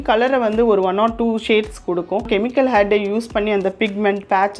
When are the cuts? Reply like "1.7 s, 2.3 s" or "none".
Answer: 2.3 s